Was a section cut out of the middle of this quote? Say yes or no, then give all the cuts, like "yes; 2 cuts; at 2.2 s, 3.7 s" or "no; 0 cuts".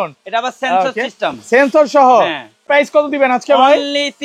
yes; 1 cut; at 2.7 s